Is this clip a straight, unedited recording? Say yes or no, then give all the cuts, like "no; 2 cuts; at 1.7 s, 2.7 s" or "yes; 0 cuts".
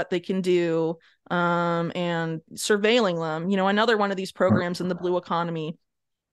yes; 0 cuts